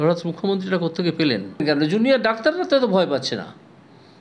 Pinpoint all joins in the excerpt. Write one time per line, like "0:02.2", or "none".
0:01.6

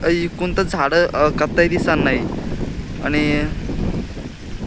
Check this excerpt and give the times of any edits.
none

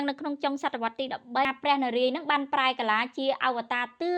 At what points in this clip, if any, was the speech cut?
0:01.5

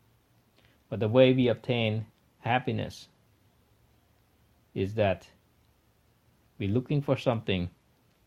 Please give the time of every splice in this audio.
0:05.2

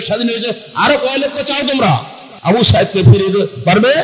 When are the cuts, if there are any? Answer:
0:02.4

